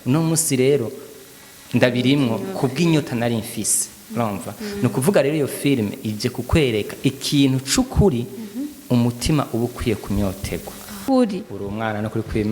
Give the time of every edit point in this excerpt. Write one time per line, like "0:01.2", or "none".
0:11.0